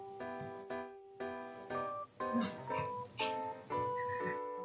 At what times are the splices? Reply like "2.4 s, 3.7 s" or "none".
none